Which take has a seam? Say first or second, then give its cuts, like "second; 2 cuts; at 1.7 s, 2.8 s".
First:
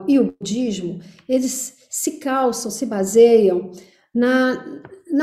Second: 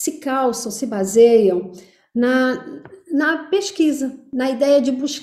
second; 1 cut; at 4.2 s